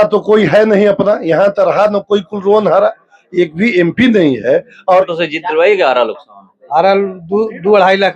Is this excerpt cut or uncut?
cut